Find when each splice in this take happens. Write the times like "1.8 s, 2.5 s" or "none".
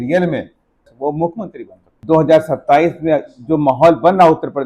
0.9 s, 1.9 s